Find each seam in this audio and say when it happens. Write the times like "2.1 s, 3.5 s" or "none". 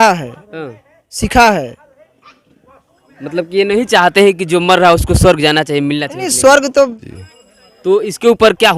7.0 s